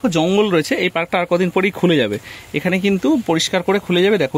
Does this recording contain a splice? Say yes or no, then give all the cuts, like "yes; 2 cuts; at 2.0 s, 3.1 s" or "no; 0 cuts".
no; 0 cuts